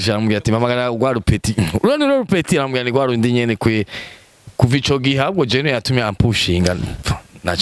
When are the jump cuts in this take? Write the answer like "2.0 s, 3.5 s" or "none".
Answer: none